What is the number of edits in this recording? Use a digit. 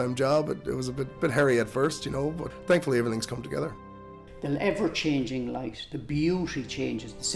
3